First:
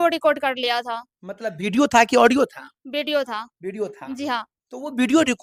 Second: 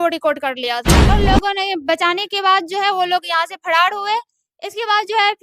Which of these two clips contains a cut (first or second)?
second